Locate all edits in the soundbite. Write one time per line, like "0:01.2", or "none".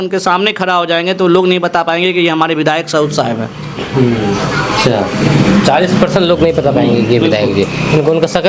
none